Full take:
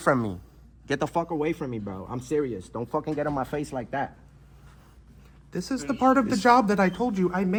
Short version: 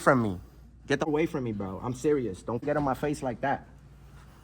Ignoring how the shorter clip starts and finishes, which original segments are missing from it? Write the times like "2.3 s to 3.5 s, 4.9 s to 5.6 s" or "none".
1.1 s to 1.3 s, 2.9 s to 3.1 s